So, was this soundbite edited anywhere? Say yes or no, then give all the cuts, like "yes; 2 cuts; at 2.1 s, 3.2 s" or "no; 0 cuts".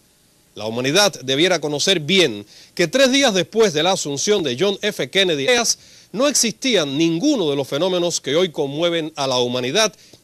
no; 0 cuts